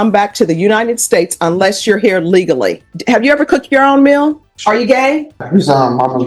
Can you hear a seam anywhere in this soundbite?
yes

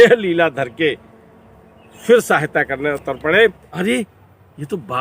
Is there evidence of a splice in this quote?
yes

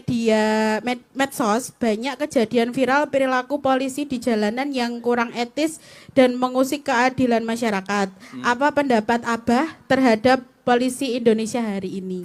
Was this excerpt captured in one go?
yes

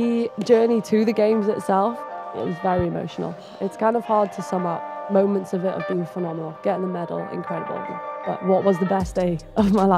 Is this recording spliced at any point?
no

